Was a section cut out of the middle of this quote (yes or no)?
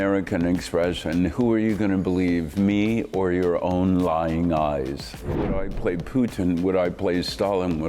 yes